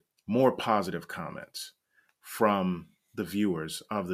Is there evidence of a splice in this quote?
no; 0 cuts

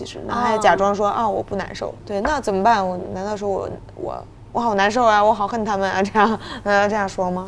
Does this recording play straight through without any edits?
yes; 0 cuts

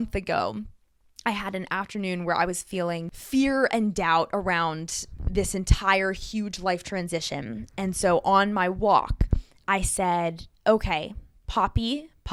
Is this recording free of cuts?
yes; 0 cuts

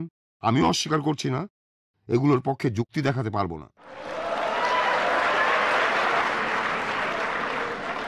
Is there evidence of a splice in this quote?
yes; 2 cuts; at 4.0 s, 6.2 s

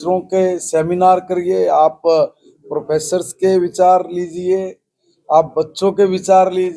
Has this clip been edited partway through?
no; 0 cuts

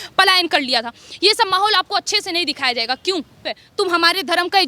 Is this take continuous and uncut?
no; 1 cut; at 3.6 s

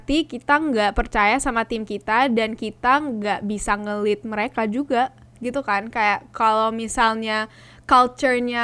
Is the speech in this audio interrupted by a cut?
no; 0 cuts

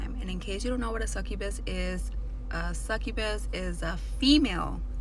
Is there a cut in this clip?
no; 0 cuts

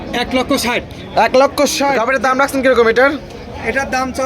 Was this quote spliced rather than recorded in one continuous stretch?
yes; 1 cut; at 2.0 s

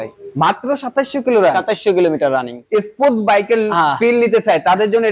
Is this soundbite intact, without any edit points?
no; 1 cut; at 2.5 s

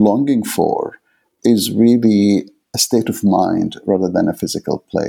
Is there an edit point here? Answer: yes; 2 cuts; at 1.3 s, 2.7 s

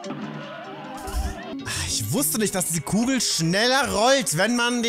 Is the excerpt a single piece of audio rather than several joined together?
no; 1 cut; at 1.5 s

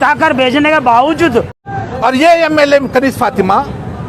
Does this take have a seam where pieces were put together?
yes; 1 cut; at 1.6 s

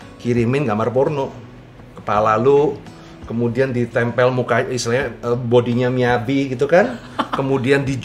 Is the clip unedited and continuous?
yes; 0 cuts

